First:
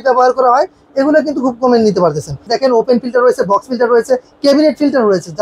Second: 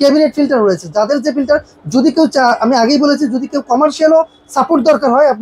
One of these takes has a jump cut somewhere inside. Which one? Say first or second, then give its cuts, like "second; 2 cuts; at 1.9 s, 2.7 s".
first; 1 cut; at 2.4 s